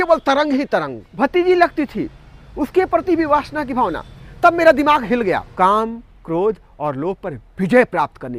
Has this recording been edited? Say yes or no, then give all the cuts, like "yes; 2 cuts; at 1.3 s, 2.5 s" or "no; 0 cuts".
yes; 2 cuts; at 1.0 s, 5.5 s